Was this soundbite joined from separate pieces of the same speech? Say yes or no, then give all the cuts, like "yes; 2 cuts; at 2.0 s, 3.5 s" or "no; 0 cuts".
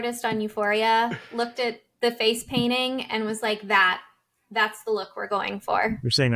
yes; 1 cut; at 1.7 s